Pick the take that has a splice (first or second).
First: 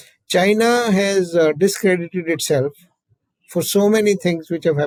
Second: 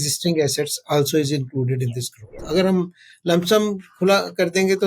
second